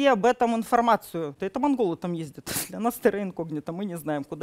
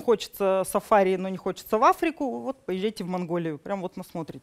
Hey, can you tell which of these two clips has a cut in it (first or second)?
first